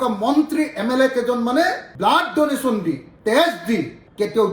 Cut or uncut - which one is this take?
uncut